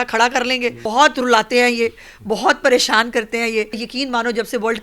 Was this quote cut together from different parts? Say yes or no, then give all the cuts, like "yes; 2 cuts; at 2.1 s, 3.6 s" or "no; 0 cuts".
yes; 2 cuts; at 0.8 s, 3.9 s